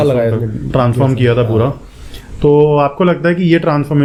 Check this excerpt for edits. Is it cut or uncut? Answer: uncut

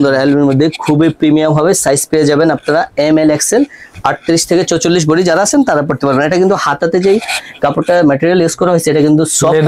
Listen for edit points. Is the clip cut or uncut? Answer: uncut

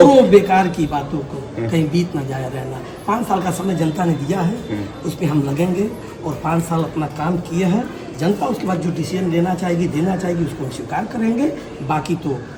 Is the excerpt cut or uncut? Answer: uncut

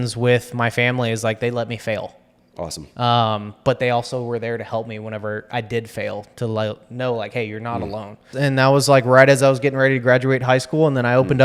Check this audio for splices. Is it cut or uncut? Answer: cut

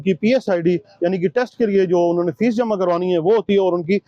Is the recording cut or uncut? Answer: uncut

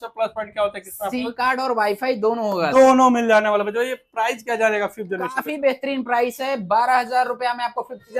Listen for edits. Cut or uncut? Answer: uncut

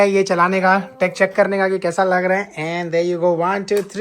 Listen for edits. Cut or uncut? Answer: uncut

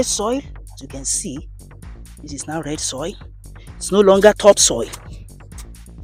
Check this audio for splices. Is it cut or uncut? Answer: uncut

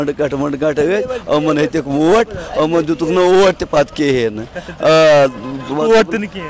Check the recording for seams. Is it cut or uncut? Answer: uncut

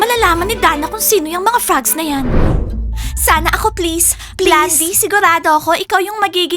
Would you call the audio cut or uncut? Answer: uncut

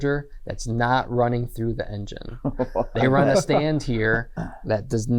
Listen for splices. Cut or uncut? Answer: uncut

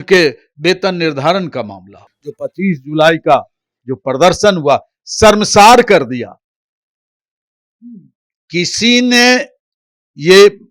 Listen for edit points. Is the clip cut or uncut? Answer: cut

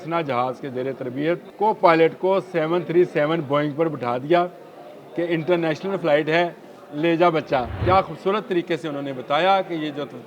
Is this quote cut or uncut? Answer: cut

